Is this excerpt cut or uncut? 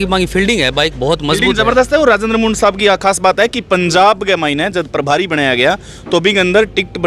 uncut